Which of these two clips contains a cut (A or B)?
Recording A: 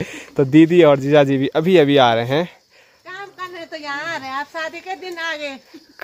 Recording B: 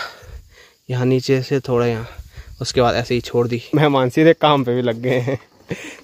B